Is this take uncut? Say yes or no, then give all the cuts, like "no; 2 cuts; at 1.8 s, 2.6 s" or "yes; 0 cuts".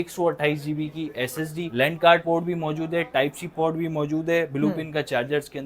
yes; 0 cuts